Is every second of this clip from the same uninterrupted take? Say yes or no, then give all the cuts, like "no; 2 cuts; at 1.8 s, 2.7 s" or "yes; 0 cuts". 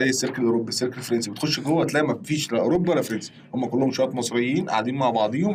yes; 0 cuts